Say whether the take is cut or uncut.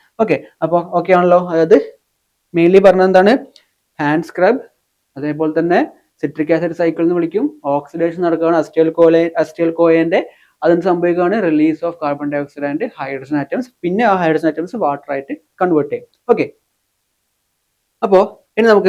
uncut